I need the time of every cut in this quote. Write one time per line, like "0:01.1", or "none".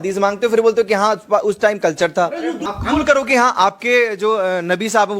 0:02.6